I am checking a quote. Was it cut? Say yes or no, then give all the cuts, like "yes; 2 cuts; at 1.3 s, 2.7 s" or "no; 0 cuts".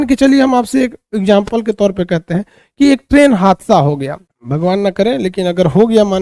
no; 0 cuts